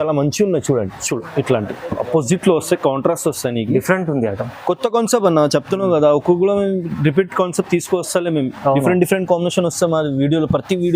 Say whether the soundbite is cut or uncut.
cut